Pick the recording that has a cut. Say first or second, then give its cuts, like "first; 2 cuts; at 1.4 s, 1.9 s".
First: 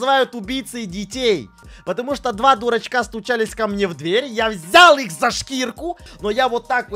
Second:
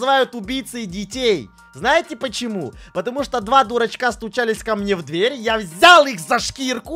first; 2 cuts; at 1.7 s, 5.9 s